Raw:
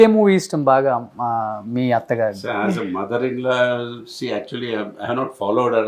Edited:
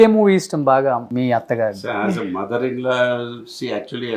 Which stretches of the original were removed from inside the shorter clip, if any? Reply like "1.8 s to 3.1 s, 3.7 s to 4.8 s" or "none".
1.1 s to 1.7 s